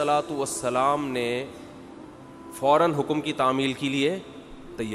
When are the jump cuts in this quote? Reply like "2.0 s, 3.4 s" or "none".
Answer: none